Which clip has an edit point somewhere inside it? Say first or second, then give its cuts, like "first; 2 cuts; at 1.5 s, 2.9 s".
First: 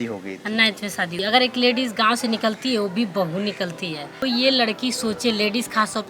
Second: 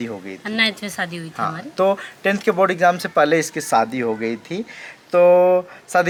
first; 2 cuts; at 1.2 s, 4.2 s